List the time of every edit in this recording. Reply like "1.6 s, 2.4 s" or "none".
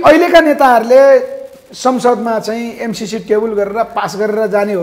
none